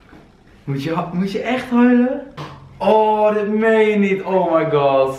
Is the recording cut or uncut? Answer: uncut